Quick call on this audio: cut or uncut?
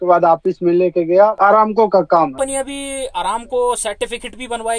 cut